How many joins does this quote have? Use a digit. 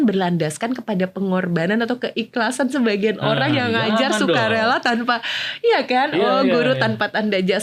0